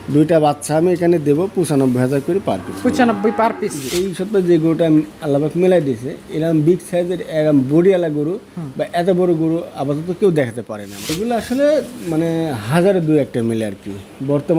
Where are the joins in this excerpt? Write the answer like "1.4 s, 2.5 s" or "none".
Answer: 3.9 s, 11.2 s

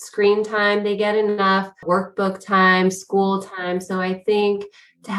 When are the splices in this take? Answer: 1.8 s

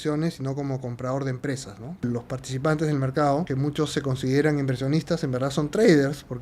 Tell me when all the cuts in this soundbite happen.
2.0 s, 3.5 s

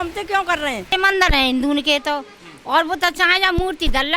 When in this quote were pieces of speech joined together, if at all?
0.9 s

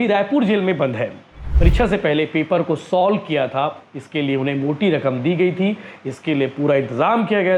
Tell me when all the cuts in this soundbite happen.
1.5 s

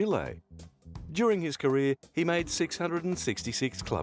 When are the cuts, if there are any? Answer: 2.3 s

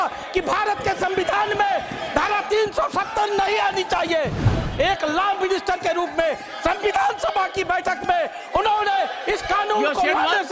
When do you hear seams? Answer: 4.5 s

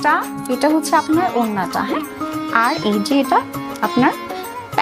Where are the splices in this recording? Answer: none

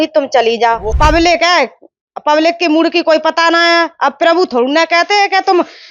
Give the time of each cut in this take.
0.9 s

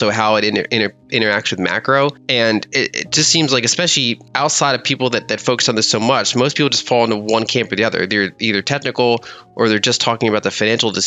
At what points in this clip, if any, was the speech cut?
2.2 s, 4.2 s

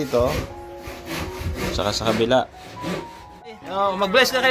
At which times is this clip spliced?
3.6 s

